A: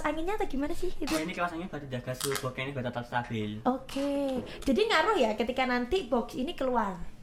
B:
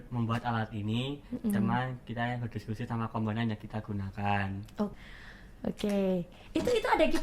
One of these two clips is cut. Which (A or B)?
B